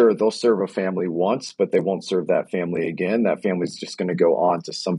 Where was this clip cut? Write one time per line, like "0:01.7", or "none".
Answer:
none